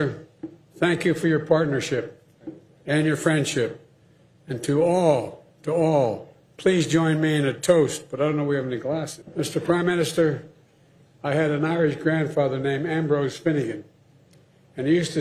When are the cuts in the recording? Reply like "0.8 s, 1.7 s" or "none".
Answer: 9.2 s